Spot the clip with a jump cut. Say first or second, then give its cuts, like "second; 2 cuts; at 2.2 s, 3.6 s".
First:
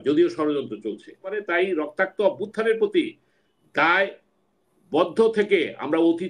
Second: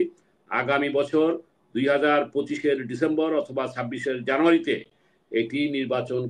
first; 1 cut; at 1.4 s